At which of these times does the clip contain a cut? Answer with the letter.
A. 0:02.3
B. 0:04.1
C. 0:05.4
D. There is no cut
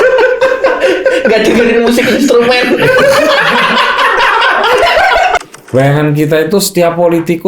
C